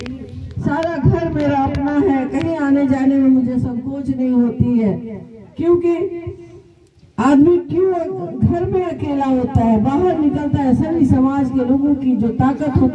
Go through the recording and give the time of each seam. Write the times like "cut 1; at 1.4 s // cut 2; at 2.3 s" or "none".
none